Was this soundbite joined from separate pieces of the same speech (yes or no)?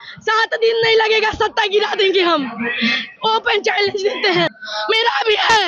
yes